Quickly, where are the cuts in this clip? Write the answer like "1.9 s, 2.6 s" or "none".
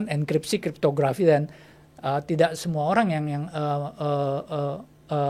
none

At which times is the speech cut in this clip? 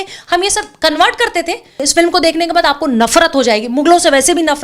1.8 s

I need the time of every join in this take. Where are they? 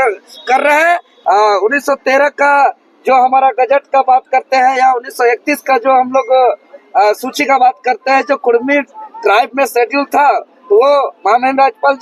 1.1 s

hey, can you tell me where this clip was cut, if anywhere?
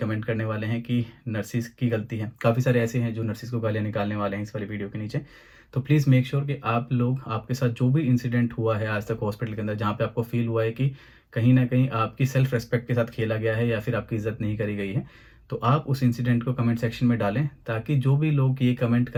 none

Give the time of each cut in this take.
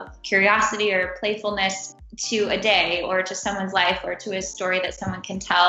none

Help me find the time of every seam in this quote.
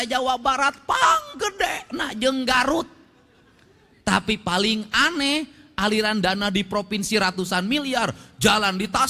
none

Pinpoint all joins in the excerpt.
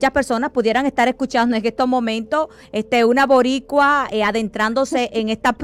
none

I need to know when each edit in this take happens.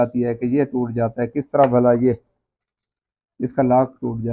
none

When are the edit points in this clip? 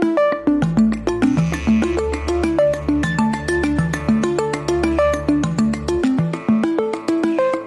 1.8 s

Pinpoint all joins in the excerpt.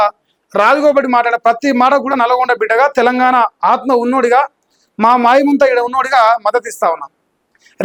none

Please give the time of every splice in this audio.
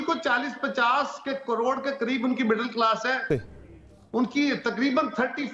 none

